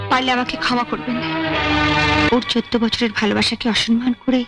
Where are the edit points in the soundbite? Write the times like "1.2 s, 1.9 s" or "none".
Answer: 2.3 s